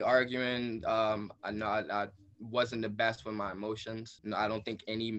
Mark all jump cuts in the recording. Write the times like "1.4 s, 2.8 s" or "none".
1.4 s, 4.1 s